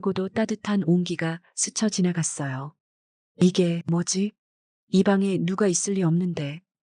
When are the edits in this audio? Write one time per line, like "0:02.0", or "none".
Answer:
0:03.8